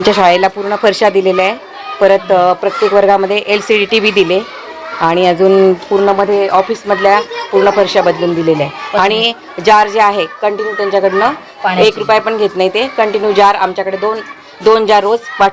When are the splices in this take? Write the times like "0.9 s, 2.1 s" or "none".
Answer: none